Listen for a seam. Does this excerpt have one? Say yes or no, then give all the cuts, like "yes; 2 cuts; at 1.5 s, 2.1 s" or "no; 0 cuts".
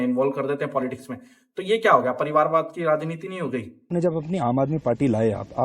yes; 1 cut; at 3.9 s